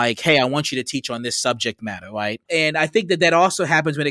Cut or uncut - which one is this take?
cut